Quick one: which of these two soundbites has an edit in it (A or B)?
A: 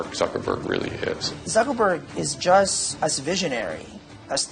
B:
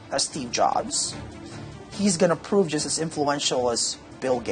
A